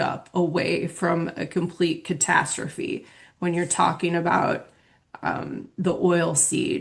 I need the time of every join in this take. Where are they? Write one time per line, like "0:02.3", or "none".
none

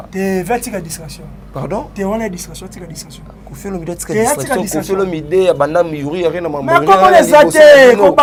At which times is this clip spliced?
none

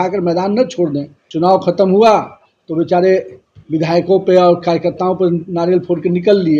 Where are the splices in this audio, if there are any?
0:01.2

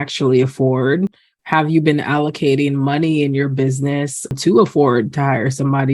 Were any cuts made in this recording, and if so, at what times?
0:04.3

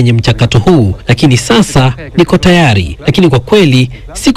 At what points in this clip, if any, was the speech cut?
0:01.0
0:02.9

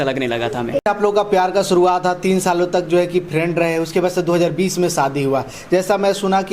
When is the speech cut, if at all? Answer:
none

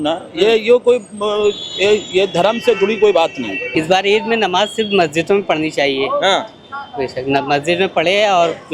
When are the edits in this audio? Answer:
0:03.7

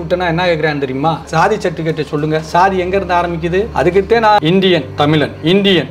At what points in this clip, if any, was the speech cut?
0:01.3
0:04.4

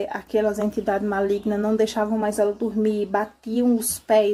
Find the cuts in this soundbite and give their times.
none

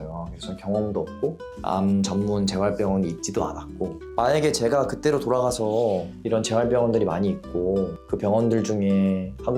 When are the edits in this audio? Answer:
none

